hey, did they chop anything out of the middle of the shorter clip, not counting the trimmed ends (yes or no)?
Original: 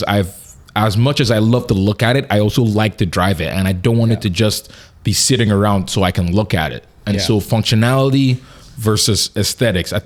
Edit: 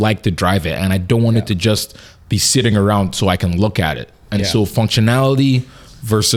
no